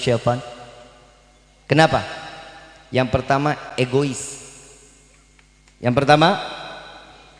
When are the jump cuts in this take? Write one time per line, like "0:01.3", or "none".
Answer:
none